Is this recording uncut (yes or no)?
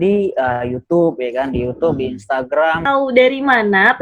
no